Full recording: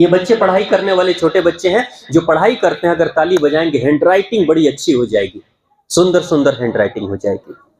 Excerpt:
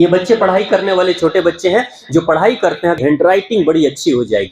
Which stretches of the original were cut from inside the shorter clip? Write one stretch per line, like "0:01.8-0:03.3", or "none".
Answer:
0:03.0-0:03.8